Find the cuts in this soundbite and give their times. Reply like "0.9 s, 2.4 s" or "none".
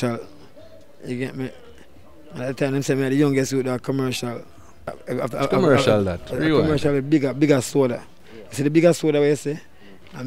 5.0 s